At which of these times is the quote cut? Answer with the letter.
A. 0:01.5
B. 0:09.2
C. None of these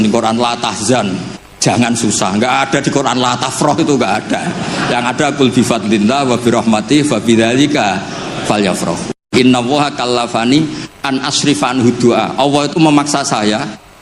B